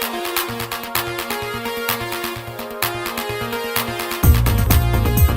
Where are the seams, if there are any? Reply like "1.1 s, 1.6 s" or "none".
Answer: 1.6 s